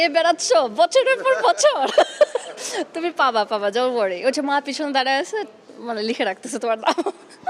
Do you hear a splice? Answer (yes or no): no